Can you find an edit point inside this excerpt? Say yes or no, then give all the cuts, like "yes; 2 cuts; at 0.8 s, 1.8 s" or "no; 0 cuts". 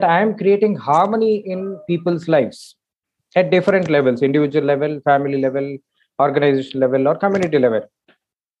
no; 0 cuts